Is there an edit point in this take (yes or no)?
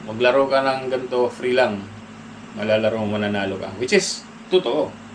no